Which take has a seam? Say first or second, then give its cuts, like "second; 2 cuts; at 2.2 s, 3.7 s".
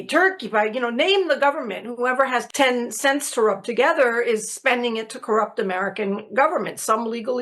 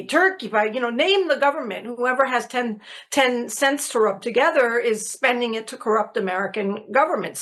first; 1 cut; at 2.5 s